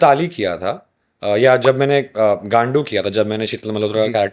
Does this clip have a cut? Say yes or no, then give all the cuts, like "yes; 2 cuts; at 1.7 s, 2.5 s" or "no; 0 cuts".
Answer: no; 0 cuts